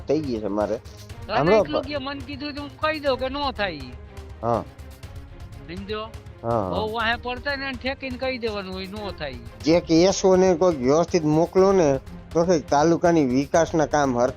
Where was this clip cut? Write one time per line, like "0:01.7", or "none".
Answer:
0:09.5